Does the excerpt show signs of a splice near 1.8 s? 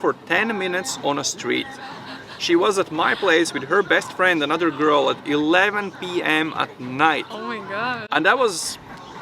no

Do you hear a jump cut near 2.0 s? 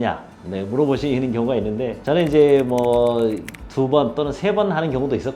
no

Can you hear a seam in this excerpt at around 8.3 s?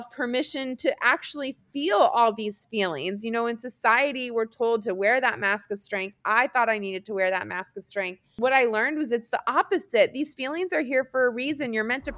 yes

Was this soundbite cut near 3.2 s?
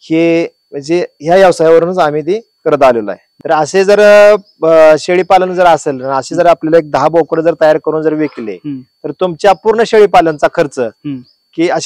yes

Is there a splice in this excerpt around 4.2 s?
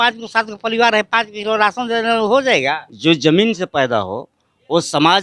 no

